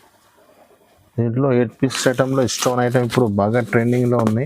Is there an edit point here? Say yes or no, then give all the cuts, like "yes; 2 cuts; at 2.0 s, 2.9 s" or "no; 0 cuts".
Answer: yes; 1 cut; at 2.0 s